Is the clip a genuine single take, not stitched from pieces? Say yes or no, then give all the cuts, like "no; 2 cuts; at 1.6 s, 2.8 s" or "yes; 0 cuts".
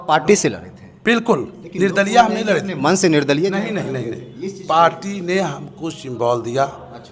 yes; 0 cuts